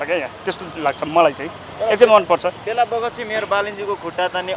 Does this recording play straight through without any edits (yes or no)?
yes